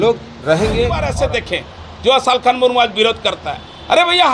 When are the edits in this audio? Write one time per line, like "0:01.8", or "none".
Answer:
0:01.1